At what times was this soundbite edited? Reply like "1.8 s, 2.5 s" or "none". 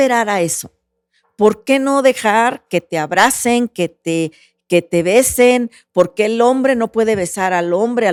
none